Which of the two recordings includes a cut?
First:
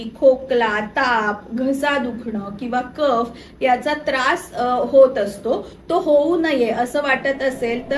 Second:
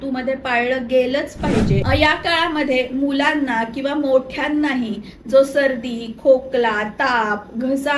second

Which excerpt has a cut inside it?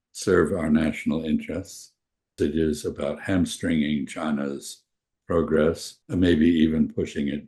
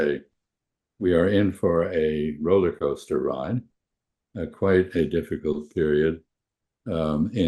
first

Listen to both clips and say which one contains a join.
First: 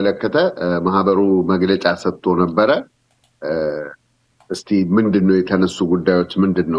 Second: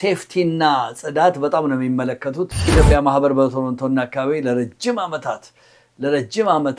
second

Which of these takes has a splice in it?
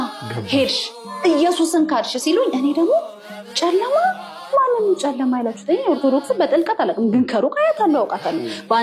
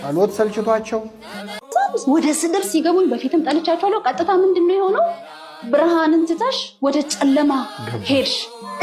second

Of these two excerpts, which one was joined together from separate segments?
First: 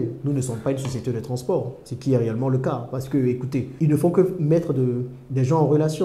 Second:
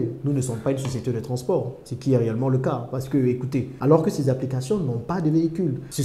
second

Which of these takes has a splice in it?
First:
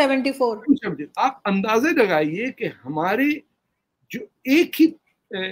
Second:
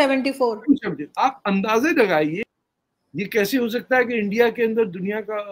second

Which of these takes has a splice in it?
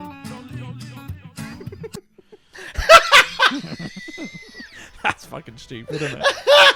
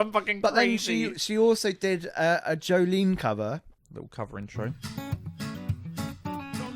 second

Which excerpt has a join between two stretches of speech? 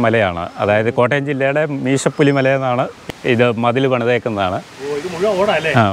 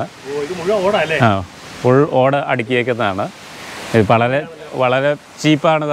first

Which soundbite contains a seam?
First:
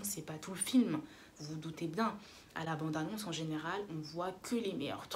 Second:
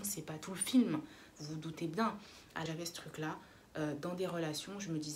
second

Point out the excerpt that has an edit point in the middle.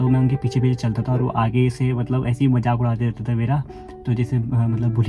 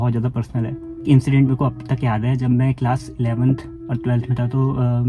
second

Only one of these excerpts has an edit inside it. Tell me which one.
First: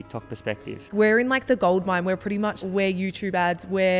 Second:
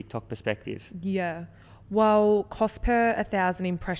first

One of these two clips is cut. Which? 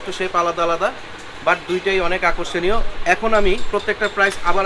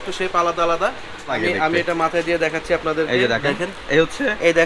second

